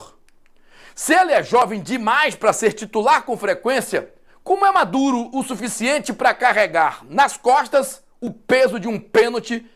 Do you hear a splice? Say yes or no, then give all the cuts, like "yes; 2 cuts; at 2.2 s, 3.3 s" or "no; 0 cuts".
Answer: no; 0 cuts